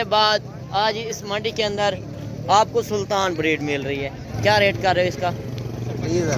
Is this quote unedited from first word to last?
no; 1 cut; at 4.3 s

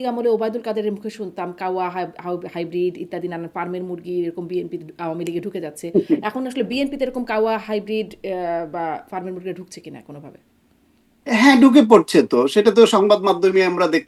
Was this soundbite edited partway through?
no; 0 cuts

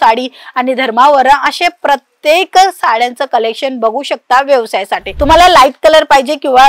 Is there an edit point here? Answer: yes; 1 cut; at 5.1 s

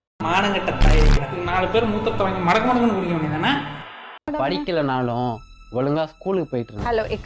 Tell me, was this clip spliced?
yes; 1 cut; at 4.3 s

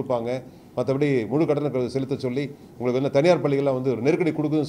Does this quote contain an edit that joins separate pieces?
no; 0 cuts

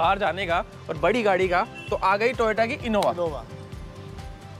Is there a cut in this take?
no; 0 cuts

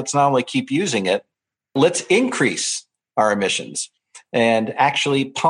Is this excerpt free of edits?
no; 1 cut; at 1.7 s

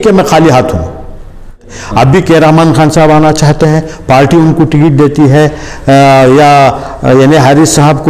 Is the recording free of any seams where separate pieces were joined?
no; 1 cut; at 1.7 s

